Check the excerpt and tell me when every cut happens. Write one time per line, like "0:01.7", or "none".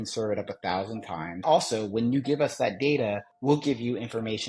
0:01.4
0:03.3